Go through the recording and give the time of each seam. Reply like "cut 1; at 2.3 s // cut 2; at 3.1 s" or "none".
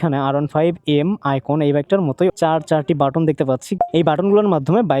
cut 1; at 1.9 s // cut 2; at 3.7 s